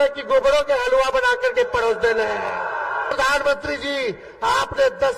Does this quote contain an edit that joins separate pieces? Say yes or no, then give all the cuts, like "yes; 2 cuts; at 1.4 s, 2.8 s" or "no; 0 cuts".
yes; 1 cut; at 3.1 s